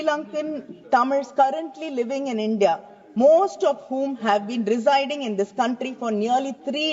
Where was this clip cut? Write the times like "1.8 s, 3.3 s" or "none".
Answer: none